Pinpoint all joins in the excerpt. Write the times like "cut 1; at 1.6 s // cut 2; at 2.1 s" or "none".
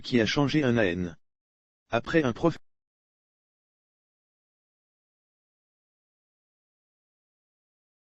none